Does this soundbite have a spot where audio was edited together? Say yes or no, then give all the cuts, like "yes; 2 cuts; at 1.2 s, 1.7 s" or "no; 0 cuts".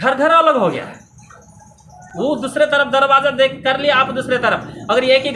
no; 0 cuts